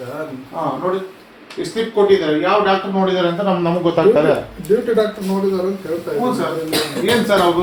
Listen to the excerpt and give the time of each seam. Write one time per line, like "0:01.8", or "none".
none